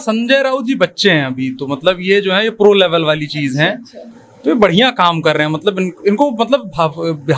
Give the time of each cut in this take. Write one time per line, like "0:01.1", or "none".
none